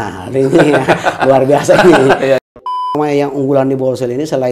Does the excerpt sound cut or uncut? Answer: cut